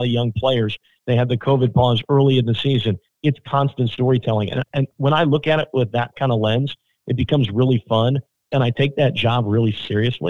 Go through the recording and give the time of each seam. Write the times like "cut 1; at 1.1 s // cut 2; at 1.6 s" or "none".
cut 1; at 3.1 s

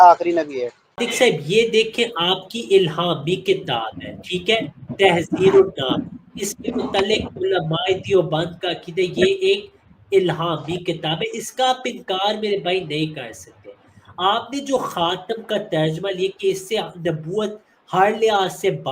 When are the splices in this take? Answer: cut 1; at 1.0 s

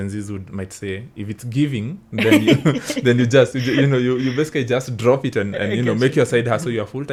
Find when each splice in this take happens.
none

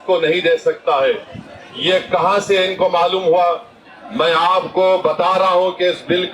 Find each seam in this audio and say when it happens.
cut 1; at 3.8 s

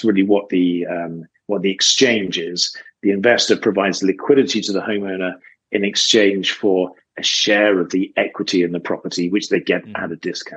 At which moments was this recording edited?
none

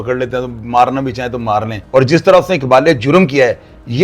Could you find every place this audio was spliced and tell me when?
cut 1; at 1.8 s

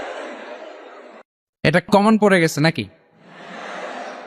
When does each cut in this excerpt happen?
cut 1; at 1.9 s

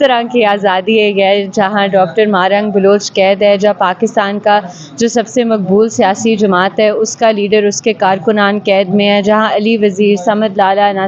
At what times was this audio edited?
none

